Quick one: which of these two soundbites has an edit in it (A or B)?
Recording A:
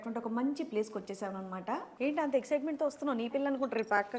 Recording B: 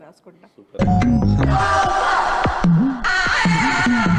A